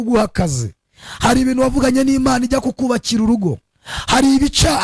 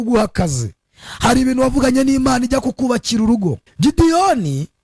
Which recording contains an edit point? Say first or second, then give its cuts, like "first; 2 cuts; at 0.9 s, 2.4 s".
second; 1 cut; at 3.7 s